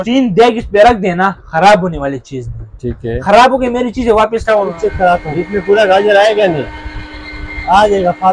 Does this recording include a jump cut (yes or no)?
yes